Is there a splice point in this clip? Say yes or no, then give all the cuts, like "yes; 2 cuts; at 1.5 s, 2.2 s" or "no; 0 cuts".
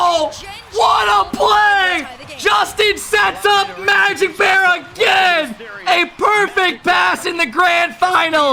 no; 0 cuts